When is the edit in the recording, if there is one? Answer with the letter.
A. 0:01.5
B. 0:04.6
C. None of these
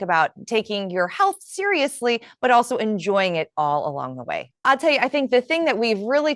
B